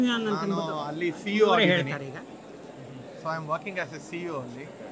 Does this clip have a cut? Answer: no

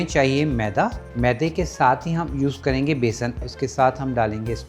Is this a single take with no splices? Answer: no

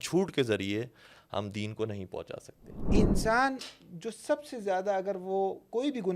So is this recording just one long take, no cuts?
no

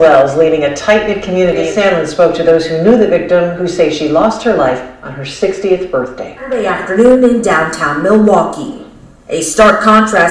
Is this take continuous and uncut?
no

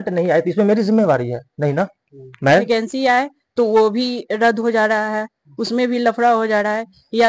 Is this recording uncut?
no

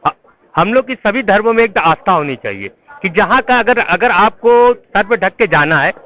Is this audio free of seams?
yes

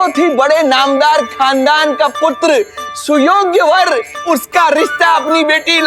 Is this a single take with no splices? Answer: no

